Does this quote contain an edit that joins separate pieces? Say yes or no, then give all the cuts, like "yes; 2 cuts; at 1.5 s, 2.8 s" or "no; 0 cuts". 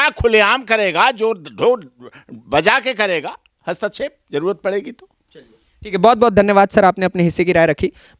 no; 0 cuts